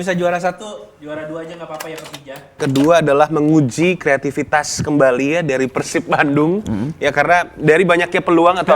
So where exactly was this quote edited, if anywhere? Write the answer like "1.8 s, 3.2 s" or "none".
2.6 s